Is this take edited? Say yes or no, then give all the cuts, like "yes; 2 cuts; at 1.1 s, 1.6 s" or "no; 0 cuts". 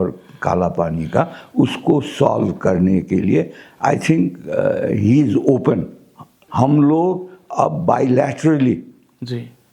yes; 1 cut; at 6.4 s